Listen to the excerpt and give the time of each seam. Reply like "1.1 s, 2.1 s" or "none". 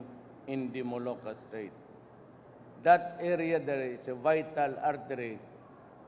3.9 s